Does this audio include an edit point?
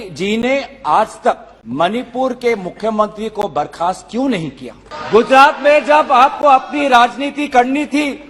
yes; 2 cuts; at 1.5 s, 4.9 s

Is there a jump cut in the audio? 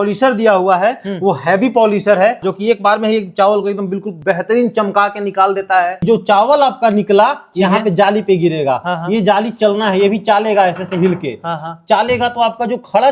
yes; 3 cuts; at 2.4 s, 4.1 s, 6.0 s

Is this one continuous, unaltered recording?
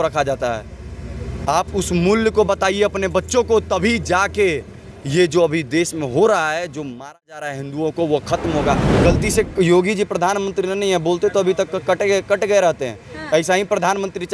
no; 1 cut; at 8.9 s

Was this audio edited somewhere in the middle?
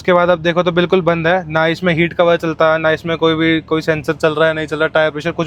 no; 0 cuts

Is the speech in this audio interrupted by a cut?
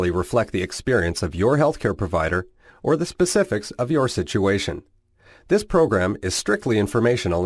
no; 0 cuts

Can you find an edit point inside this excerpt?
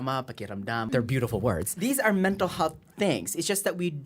yes; 2 cuts; at 0.9 s, 1.7 s

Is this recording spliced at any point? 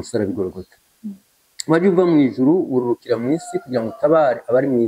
no; 0 cuts

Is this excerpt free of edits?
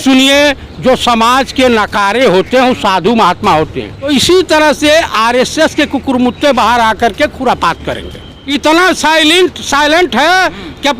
no; 2 cuts; at 4.0 s, 8.3 s

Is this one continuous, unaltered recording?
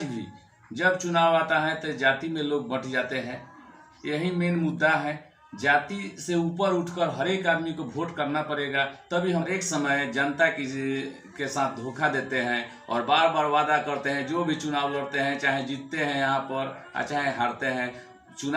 no; 1 cut; at 9.4 s

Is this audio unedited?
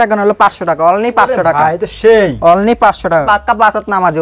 no; 1 cut; at 3.2 s

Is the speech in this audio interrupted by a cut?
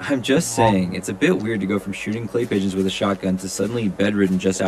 no; 0 cuts

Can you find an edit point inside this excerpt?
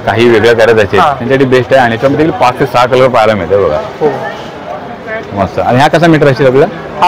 no; 0 cuts

